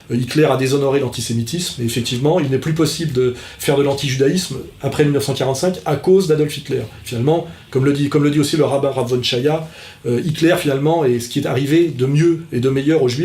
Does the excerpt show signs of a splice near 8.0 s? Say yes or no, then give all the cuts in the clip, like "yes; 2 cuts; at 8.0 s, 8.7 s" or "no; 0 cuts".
yes; 1 cut; at 8.0 s